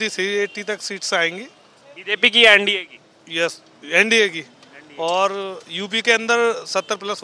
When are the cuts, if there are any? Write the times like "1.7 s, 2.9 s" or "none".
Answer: none